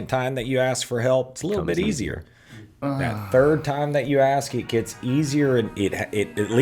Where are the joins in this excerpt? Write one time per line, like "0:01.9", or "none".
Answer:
none